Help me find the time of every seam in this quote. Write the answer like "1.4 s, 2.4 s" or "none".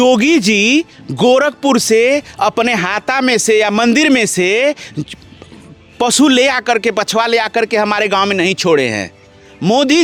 none